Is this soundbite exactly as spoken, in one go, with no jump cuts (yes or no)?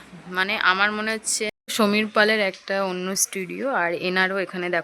no